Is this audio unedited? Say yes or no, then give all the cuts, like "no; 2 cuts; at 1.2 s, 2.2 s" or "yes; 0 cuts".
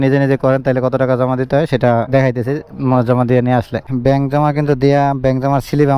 yes; 0 cuts